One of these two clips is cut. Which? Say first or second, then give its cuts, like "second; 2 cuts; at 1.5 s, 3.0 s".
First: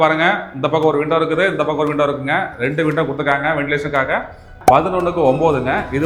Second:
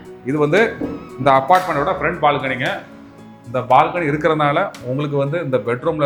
first; 1 cut; at 4.5 s